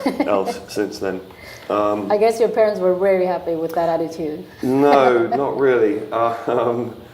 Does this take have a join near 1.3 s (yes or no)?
yes